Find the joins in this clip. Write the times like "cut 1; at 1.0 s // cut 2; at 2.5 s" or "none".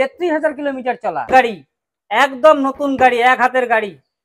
cut 1; at 1.3 s